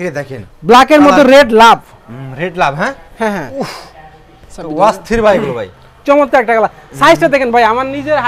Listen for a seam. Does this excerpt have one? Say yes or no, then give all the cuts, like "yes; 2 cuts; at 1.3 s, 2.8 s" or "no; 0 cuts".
no; 0 cuts